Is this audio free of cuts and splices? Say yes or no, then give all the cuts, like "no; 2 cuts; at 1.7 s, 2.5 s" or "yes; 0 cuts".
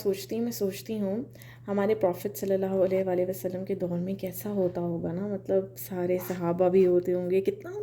yes; 0 cuts